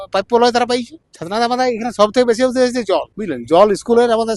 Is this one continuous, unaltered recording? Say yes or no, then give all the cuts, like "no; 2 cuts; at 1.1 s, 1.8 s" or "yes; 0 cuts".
yes; 0 cuts